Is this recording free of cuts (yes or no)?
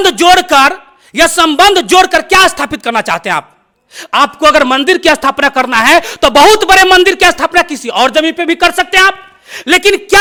yes